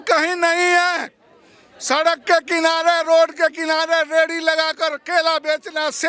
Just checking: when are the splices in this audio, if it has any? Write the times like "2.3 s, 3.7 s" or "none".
none